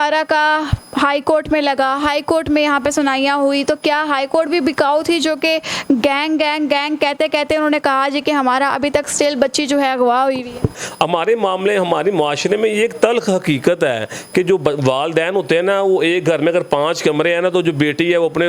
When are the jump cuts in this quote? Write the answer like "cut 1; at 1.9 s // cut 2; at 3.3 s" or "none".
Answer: cut 1; at 10.7 s